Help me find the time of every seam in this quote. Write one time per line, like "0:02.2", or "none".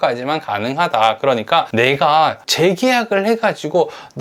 0:01.7